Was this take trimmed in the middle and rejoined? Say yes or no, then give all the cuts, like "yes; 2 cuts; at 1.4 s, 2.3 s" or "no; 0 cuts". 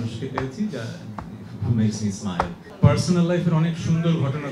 yes; 1 cut; at 2.6 s